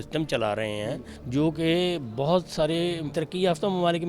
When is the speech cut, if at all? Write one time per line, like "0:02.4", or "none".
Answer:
0:01.1
0:03.1